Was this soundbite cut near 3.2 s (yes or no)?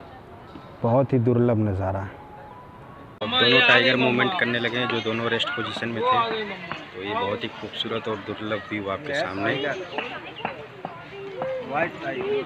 yes